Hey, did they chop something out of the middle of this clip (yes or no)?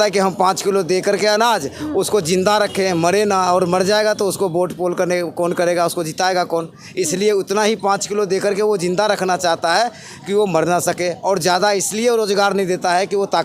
no